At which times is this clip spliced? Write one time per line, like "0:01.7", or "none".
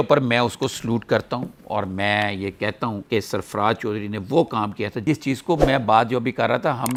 none